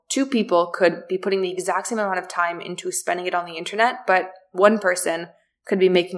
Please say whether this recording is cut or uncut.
uncut